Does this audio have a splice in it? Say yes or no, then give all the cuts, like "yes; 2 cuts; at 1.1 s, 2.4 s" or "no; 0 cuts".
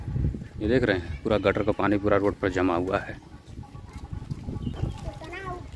no; 0 cuts